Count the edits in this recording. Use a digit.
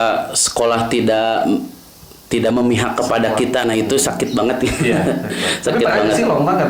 0